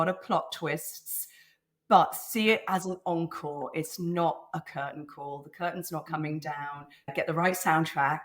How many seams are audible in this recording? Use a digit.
1